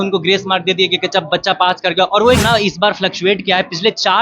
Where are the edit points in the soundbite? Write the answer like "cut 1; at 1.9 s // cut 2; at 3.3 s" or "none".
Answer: cut 1; at 2.4 s